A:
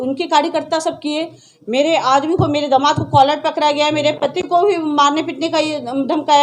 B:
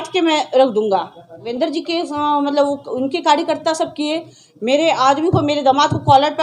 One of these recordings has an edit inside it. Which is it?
B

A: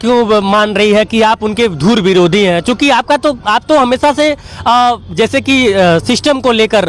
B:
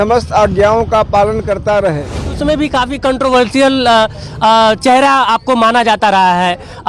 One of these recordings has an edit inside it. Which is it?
B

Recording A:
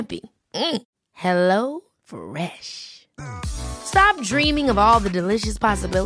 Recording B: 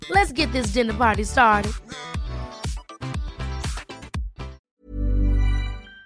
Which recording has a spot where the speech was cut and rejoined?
B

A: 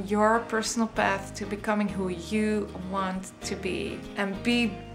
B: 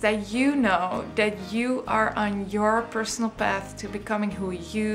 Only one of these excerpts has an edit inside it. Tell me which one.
A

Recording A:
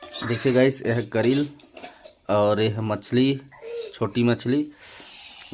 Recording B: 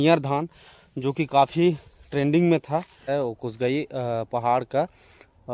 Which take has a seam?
B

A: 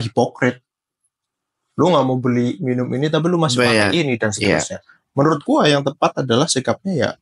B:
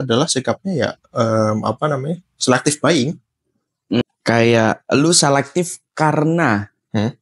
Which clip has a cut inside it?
B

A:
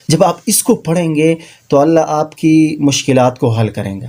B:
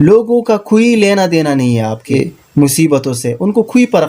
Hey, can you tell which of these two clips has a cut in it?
B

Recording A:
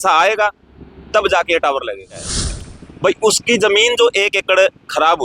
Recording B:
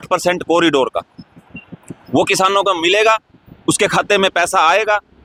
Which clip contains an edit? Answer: A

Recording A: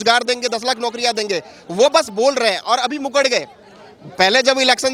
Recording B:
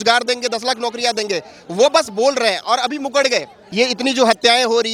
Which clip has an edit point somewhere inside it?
B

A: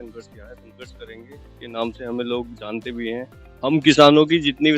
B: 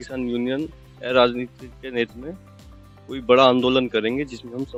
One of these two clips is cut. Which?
A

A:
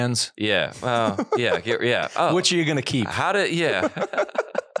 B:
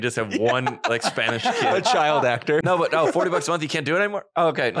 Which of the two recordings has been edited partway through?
B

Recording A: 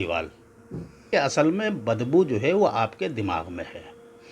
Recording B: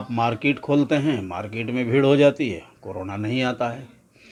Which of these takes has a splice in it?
A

